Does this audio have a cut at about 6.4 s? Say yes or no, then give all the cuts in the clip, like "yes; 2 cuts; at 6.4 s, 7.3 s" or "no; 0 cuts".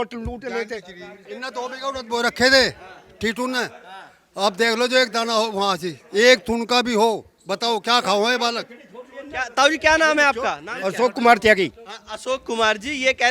no; 1 cut; at 1.3 s